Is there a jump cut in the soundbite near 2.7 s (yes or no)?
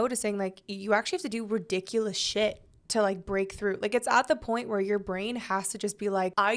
no